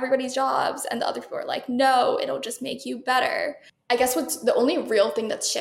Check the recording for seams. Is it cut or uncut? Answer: cut